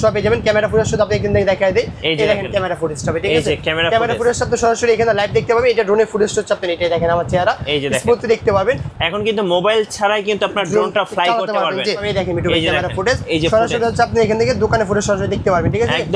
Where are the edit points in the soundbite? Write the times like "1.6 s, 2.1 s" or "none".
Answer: 8.9 s, 12.1 s

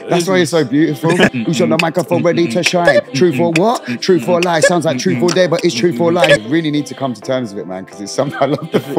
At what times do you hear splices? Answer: 1.3 s, 6.4 s

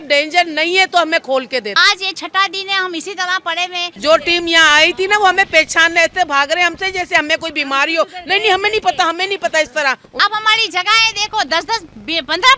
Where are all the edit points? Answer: 1.7 s, 3.9 s, 10.1 s

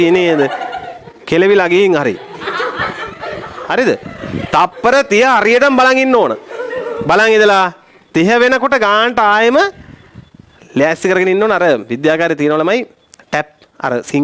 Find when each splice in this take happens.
none

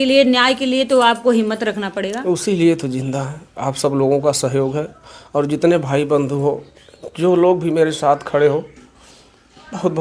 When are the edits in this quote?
none

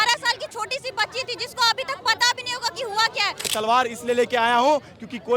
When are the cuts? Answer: 3.4 s

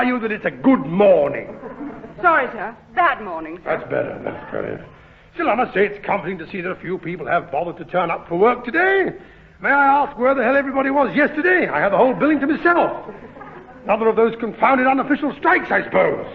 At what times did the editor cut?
none

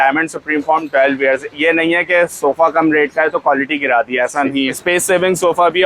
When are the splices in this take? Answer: 4.8 s

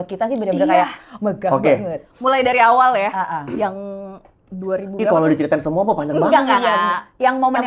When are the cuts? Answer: none

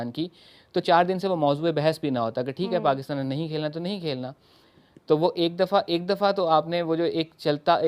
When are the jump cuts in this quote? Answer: none

